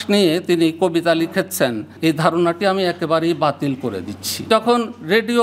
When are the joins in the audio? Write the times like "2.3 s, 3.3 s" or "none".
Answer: 1.9 s, 4.5 s